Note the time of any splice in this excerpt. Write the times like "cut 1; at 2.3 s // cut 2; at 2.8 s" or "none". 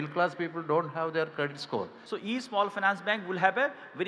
cut 1; at 2.0 s